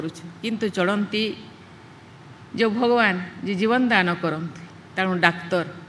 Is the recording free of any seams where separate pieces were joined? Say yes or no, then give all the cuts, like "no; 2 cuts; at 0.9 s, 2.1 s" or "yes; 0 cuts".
yes; 0 cuts